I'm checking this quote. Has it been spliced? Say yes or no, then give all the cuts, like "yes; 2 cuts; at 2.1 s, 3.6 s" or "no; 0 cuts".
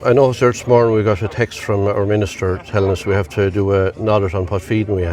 no; 0 cuts